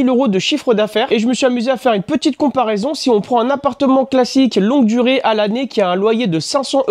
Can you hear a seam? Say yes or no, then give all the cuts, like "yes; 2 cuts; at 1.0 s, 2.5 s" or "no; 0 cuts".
no; 0 cuts